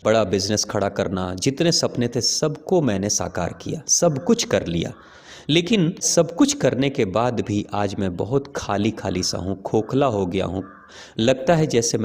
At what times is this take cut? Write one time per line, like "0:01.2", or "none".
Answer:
0:06.1